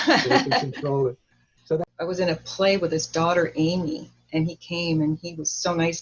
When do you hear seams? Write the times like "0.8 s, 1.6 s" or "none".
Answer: 1.8 s